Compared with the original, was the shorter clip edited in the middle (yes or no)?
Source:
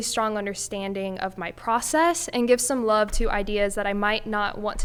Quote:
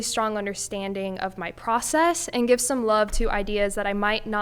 no